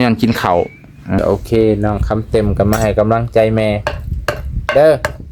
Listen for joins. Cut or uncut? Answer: cut